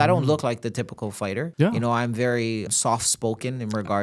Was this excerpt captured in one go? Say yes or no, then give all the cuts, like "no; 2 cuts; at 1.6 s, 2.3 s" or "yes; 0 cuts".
no; 2 cuts; at 1.5 s, 2.7 s